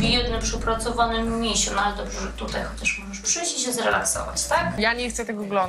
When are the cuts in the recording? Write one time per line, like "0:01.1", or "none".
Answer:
0:04.7

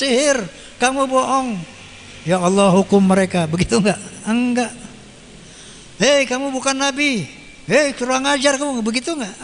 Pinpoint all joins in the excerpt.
none

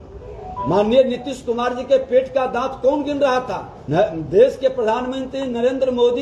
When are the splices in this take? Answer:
0:03.7

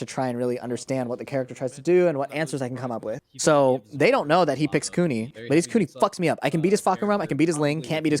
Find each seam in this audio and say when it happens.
0:03.2
0:05.4

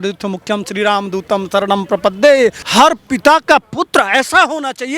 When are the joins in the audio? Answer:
0:02.6

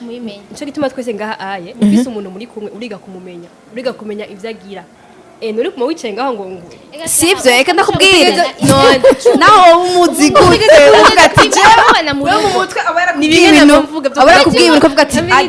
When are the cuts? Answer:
none

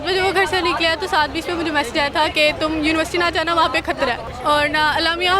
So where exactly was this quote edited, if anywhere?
0:04.3

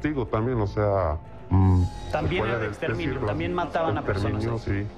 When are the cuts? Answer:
0:01.3

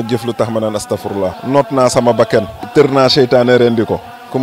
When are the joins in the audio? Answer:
0:01.4
0:02.6

